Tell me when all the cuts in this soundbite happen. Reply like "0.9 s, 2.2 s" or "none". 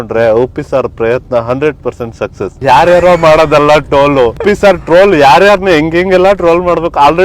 2.6 s, 4.4 s